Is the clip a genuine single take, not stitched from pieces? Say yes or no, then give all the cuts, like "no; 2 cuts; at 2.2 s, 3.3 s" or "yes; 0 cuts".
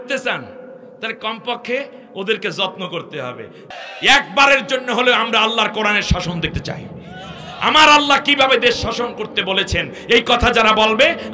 no; 1 cut; at 3.7 s